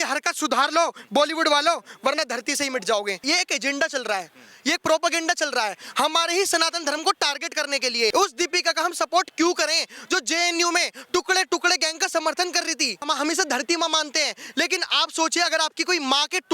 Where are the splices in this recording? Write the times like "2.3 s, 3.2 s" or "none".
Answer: 3.2 s, 8.1 s, 13.1 s